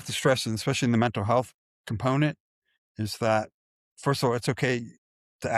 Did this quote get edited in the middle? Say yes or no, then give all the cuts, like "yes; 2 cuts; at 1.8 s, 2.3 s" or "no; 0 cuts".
no; 0 cuts